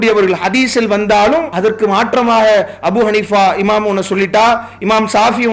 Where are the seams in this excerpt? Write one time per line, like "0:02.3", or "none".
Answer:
0:01.5